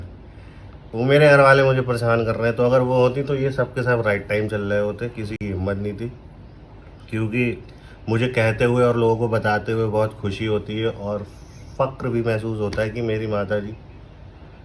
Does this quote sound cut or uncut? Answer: uncut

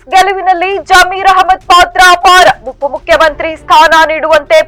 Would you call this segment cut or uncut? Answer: uncut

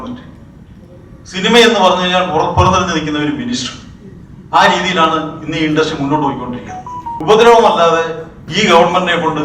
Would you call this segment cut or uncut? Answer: cut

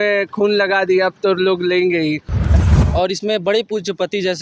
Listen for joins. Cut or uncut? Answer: cut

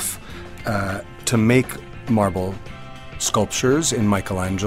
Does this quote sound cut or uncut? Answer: uncut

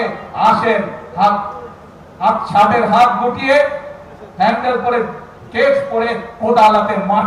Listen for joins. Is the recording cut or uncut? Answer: uncut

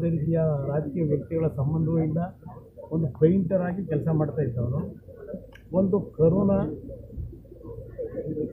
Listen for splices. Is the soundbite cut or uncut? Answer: uncut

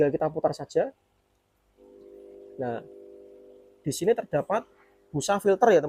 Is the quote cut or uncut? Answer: uncut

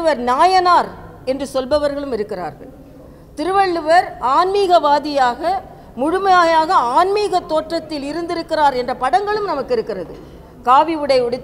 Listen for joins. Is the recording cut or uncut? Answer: uncut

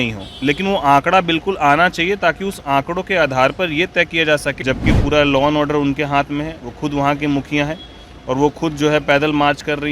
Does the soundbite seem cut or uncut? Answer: cut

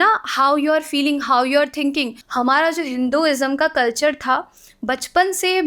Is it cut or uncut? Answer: cut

